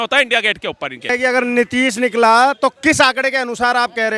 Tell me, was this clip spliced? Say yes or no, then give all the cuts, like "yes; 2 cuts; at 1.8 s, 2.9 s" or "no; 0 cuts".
yes; 1 cut; at 1.1 s